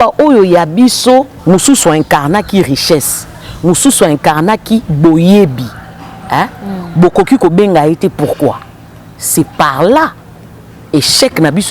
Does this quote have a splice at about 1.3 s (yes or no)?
yes